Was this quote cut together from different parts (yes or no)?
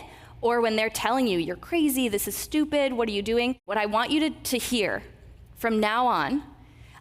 yes